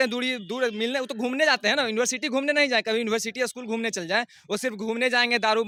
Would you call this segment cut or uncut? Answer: uncut